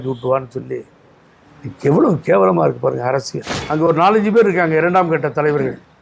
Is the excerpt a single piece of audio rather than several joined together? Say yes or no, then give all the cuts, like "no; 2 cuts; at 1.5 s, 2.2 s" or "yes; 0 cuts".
no; 1 cut; at 3.6 s